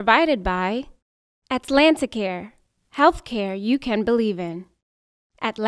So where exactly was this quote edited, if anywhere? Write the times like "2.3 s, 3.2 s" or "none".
none

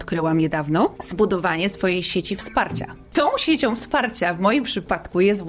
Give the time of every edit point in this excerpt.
1.0 s, 3.0 s

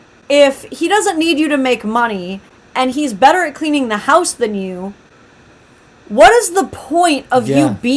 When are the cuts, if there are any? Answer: none

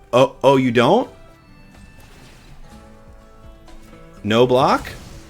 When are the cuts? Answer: 1.4 s

